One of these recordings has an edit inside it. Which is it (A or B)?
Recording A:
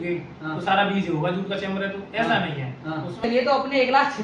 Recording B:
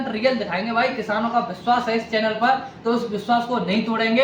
A